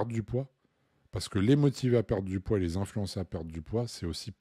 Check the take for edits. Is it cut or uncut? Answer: uncut